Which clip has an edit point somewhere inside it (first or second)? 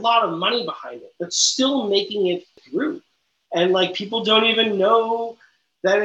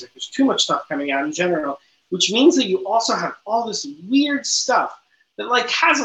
first